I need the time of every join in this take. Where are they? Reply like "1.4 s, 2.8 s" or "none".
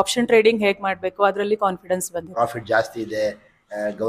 2.3 s